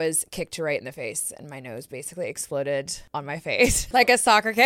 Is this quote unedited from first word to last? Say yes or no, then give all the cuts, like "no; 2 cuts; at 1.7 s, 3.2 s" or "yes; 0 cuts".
no; 1 cut; at 3.5 s